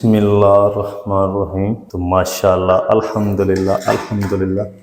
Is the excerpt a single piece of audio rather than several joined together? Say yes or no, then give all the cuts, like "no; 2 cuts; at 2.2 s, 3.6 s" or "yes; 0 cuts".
no; 1 cut; at 1.9 s